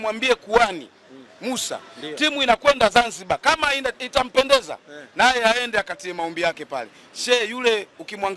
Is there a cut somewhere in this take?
no; 0 cuts

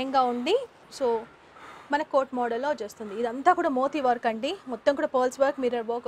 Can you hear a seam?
no; 0 cuts

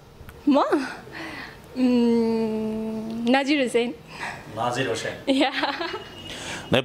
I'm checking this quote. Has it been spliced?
no; 0 cuts

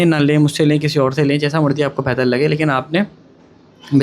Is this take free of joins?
yes; 0 cuts

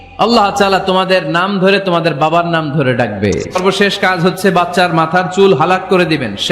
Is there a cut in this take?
yes; 1 cut; at 3.6 s

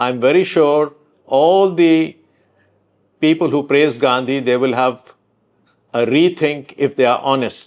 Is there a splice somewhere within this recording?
no; 0 cuts

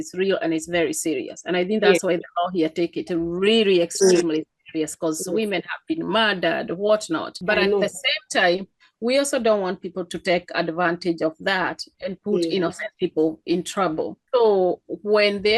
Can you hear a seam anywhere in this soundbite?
yes; 2 cuts; at 7.3 s, 14.2 s

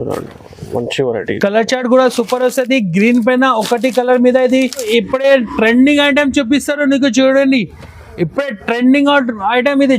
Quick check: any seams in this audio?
yes; 1 cut; at 4.9 s

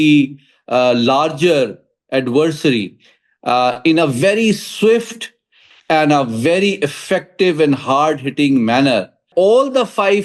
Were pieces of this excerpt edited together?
yes; 1 cut; at 9.2 s

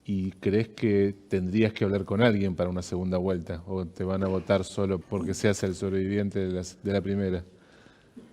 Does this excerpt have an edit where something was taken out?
yes; 1 cut; at 5.0 s

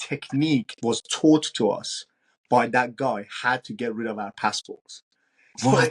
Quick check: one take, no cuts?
yes; 0 cuts

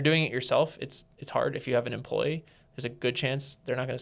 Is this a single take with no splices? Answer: yes; 0 cuts

